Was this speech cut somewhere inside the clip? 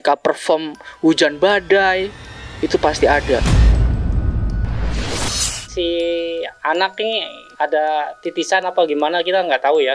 yes; 3 cuts; at 3.4 s, 5.5 s, 7.4 s

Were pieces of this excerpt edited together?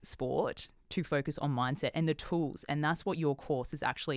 no; 0 cuts

